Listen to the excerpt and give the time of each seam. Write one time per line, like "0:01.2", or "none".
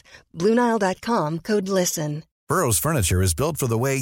0:02.3